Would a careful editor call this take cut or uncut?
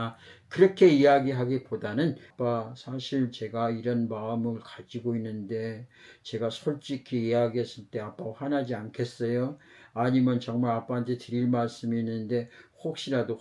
cut